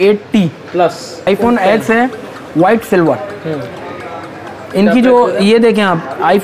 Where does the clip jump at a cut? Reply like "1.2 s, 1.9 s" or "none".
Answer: 1.3 s